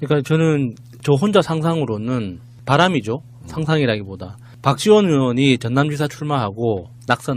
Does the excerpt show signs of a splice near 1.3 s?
yes; 1 cut; at 1.3 s

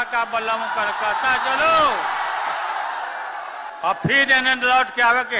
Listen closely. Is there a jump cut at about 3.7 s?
yes; 1 cut; at 3.7 s

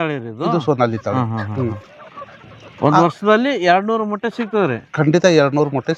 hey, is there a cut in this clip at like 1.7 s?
no; 0 cuts

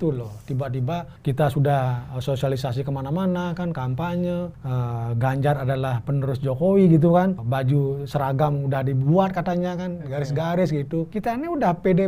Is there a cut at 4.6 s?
yes; 4 cuts; at 1.1 s, 4.6 s, 7.4 s, 11.1 s

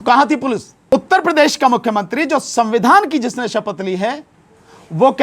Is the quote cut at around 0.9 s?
yes; 1 cut; at 0.9 s

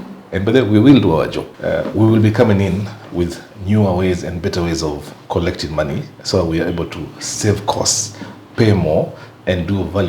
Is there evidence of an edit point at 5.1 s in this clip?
no; 1 cut; at 1.4 s

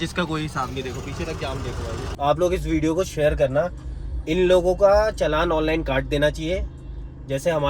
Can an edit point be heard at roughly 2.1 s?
yes; 1 cut; at 2.1 s

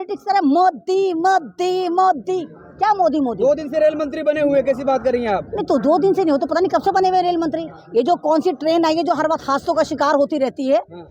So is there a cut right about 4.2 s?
no; 0 cuts

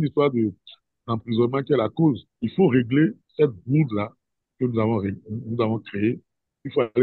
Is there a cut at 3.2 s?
yes; 2 cuts; at 2.3 s, 3.2 s

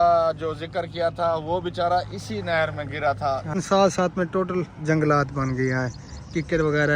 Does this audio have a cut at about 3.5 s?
yes; 1 cut; at 3.5 s

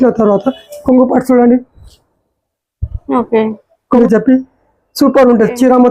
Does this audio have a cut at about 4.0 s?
yes; 1 cut; at 4.0 s

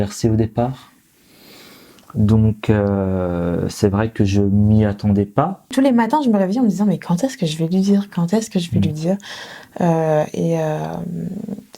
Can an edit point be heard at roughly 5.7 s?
yes; 1 cut; at 5.7 s

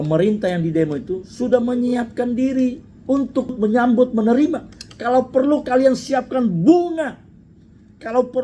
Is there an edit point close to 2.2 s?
no; 1 cut; at 3.5 s

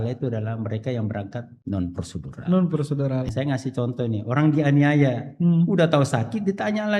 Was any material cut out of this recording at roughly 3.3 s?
yes; 2 cuts; at 1.5 s, 3.3 s

